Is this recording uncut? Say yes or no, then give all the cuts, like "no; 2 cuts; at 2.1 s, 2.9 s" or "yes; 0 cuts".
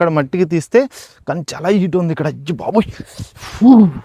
yes; 0 cuts